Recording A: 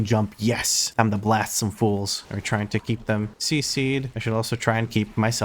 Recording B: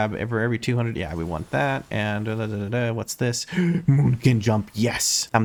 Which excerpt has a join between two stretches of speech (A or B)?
A